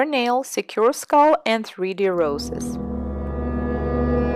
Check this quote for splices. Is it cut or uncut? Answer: uncut